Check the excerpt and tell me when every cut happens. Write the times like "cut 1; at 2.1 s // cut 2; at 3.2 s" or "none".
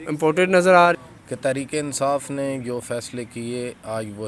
cut 1; at 1.0 s